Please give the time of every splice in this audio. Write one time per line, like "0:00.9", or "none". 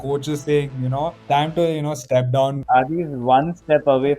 0:01.2
0:02.5

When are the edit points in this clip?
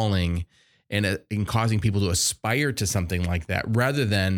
none

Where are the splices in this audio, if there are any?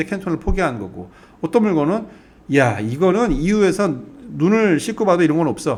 none

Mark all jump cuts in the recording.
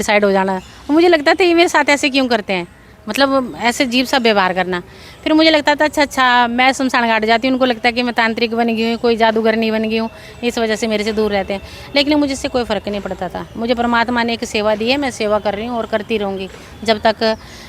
none

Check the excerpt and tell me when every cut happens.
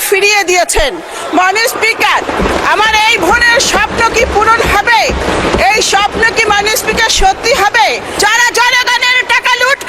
0:08.2

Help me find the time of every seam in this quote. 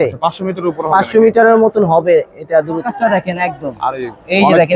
0:02.9

